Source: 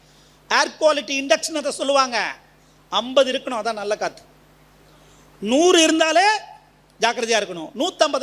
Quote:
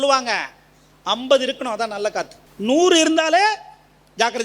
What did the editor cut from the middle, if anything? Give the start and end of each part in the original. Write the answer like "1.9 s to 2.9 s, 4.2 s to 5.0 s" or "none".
4.3 s to 5.2 s